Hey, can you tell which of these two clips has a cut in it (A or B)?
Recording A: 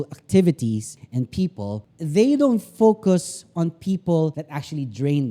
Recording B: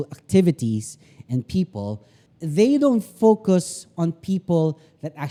A